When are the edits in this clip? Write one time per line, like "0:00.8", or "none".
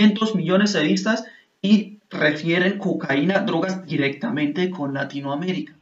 none